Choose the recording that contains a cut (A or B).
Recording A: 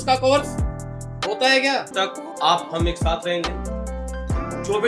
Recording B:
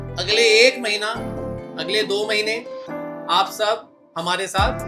A